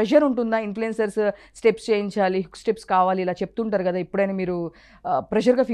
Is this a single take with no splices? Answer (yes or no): yes